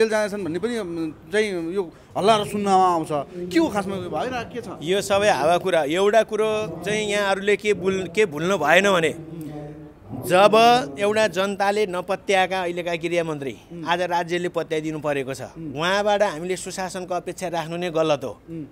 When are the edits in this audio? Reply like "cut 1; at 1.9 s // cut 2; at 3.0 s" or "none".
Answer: none